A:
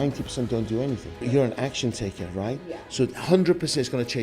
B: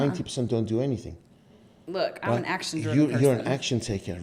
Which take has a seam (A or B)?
A